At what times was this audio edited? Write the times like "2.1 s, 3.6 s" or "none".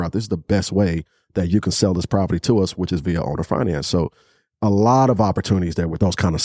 none